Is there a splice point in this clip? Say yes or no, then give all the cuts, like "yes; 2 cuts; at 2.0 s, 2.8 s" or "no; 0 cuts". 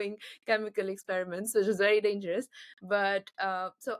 no; 0 cuts